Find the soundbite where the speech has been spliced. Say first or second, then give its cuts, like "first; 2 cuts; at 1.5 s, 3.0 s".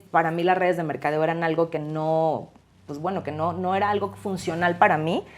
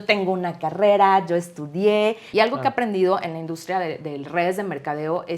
second; 1 cut; at 2.2 s